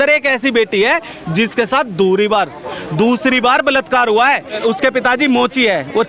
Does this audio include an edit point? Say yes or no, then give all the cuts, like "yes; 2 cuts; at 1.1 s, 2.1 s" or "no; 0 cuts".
yes; 1 cut; at 4.6 s